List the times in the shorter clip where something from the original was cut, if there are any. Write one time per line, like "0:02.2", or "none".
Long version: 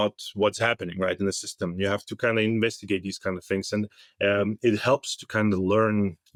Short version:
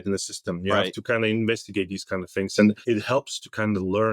0:02.8